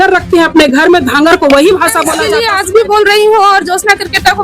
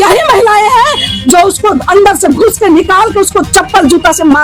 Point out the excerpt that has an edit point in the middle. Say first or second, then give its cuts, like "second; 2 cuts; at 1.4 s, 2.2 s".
first; 1 cut; at 2.3 s